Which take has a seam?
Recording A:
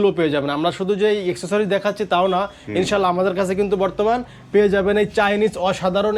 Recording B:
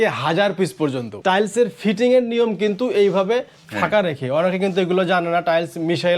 B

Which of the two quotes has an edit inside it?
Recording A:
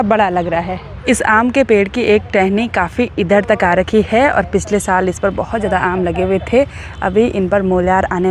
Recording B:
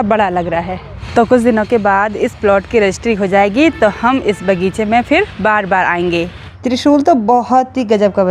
B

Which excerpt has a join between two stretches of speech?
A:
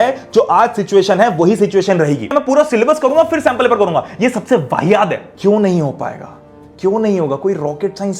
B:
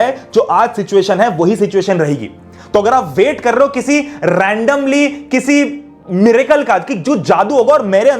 A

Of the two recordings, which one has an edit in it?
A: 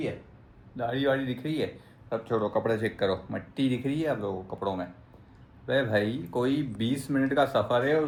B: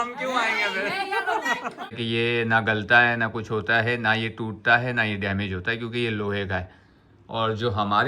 B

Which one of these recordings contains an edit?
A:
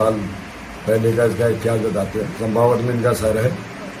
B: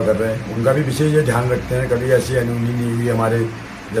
A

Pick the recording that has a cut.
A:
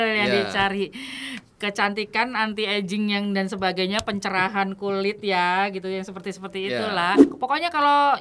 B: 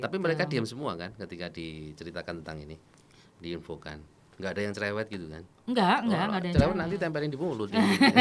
A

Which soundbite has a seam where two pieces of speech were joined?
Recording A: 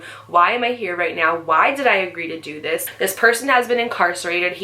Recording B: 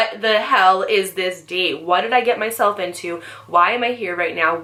A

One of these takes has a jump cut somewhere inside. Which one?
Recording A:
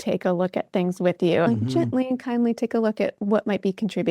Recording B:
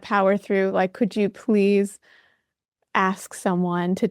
A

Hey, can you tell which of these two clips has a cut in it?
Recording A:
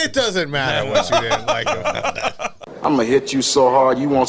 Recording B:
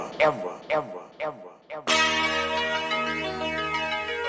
A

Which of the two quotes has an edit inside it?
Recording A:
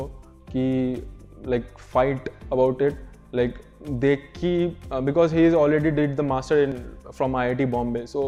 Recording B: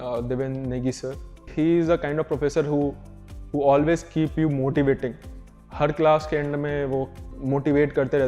B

